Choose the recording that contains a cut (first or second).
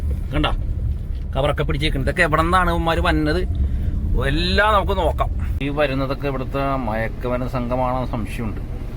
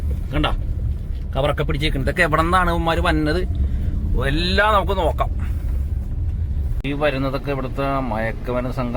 first